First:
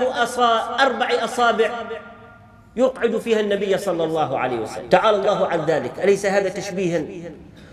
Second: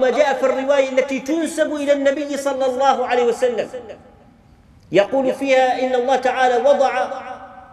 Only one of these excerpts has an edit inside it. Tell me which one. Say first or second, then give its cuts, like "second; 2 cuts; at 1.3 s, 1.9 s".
first; 1 cut; at 4.8 s